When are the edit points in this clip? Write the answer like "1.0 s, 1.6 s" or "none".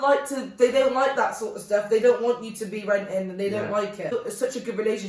4.1 s

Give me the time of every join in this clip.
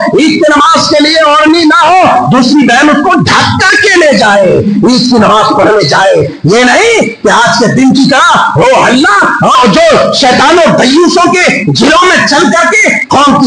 9.5 s

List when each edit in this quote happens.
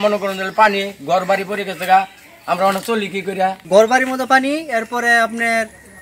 3.6 s

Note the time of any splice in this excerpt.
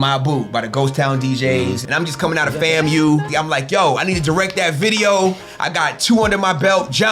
1.8 s, 3.3 s

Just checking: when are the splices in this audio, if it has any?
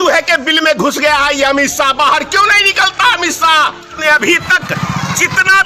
4.0 s

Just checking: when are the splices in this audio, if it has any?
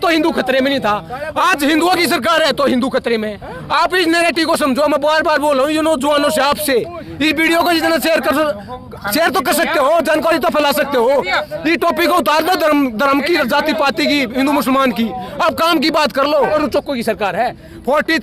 16.5 s

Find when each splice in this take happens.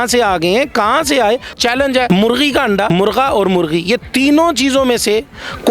1.6 s, 2.9 s

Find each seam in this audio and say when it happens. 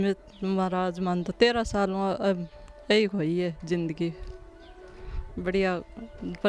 none

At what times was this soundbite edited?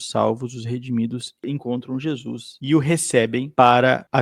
1.4 s

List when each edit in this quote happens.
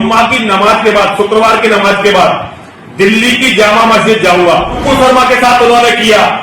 4.8 s

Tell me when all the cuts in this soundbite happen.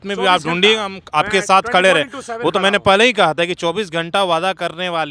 none

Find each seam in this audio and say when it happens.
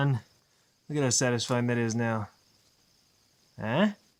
none

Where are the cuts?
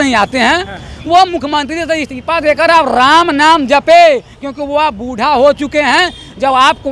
none

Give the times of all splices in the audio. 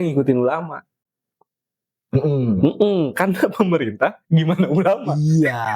none

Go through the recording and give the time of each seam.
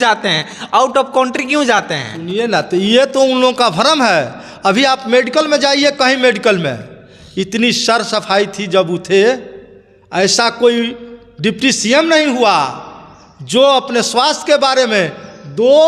none

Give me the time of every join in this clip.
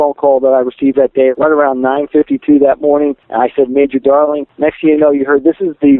1.3 s, 3.2 s, 4.5 s

